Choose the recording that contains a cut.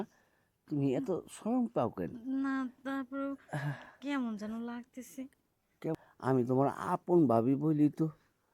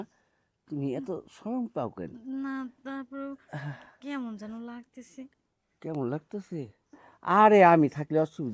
first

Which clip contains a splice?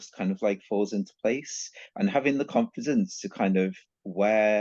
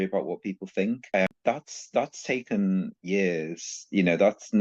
second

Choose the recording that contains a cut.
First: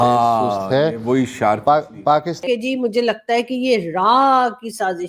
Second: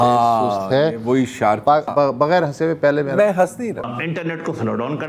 second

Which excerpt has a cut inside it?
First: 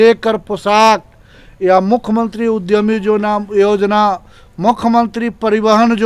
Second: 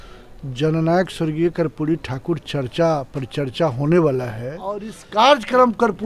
second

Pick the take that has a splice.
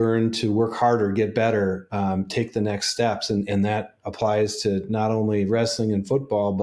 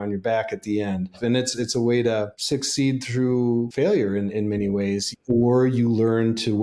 second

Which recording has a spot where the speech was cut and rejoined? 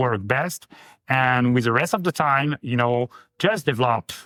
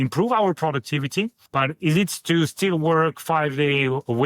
second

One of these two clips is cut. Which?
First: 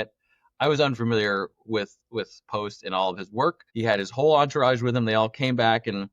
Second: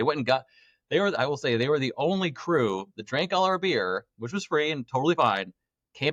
first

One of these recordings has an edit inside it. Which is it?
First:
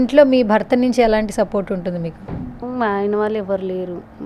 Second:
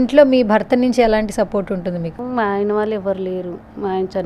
second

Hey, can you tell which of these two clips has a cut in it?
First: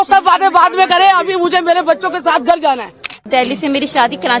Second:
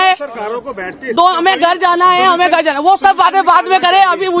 first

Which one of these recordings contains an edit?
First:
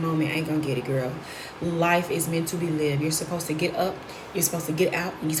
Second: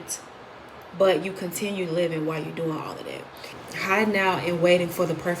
second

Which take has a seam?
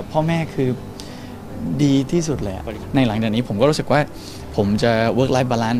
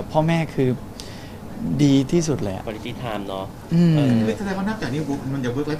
first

